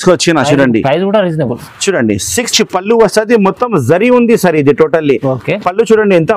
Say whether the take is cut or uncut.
cut